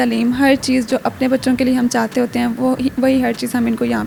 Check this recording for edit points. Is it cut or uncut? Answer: uncut